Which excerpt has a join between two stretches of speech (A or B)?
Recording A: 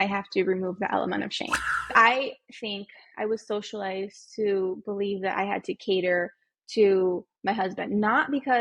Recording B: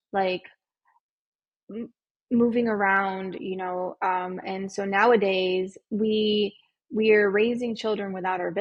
A